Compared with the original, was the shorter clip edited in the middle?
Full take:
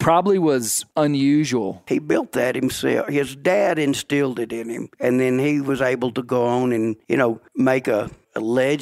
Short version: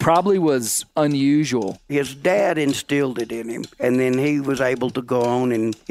yes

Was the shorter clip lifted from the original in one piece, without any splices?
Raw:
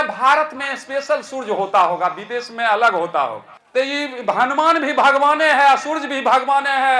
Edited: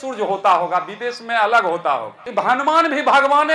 no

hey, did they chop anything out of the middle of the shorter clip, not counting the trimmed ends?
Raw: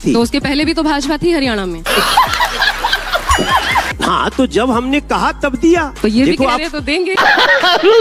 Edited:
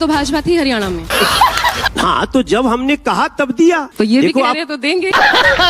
yes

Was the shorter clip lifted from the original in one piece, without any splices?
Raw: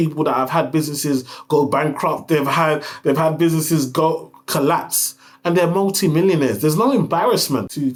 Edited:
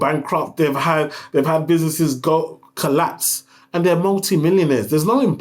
yes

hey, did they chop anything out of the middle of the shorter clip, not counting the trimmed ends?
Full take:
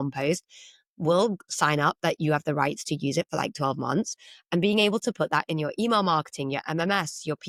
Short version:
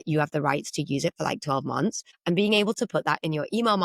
yes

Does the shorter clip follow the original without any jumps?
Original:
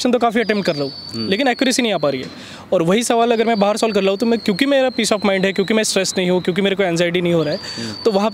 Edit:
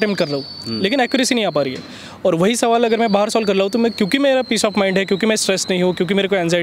yes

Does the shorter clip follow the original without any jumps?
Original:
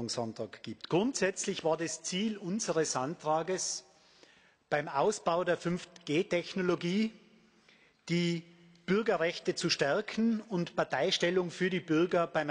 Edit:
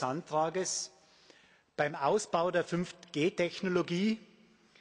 yes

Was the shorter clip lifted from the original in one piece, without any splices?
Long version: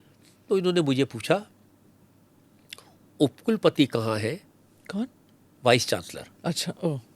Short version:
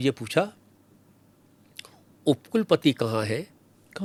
yes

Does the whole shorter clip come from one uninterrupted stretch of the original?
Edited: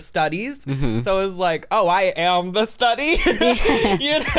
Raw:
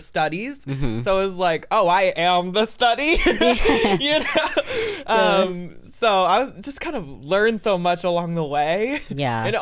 yes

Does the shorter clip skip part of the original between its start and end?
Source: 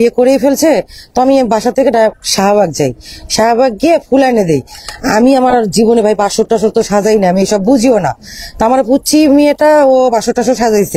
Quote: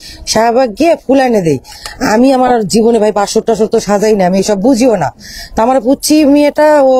no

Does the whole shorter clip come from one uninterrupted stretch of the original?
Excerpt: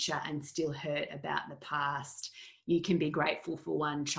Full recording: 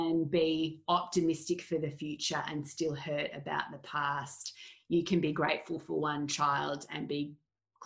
yes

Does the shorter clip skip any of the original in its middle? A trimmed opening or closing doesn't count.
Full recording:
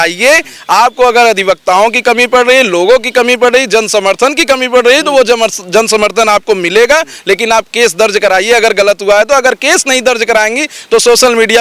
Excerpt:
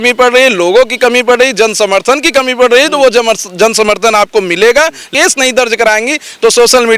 yes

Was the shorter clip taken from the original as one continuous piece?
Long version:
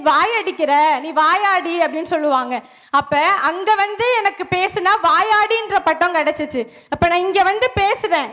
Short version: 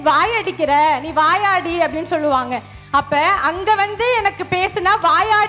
yes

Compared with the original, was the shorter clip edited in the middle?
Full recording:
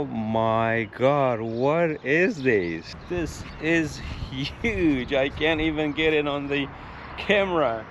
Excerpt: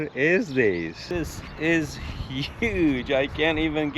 yes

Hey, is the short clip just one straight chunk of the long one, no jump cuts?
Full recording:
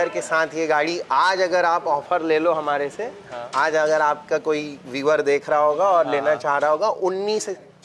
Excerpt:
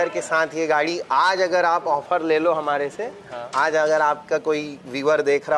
yes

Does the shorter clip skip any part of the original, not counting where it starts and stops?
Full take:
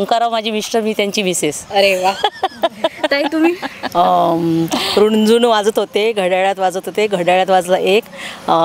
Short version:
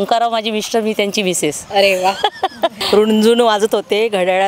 yes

